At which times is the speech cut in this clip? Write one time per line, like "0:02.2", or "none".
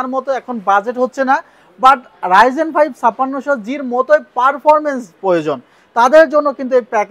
none